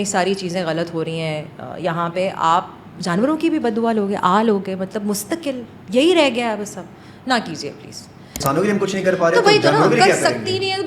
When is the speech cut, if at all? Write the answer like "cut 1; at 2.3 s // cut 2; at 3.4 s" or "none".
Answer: cut 1; at 8.4 s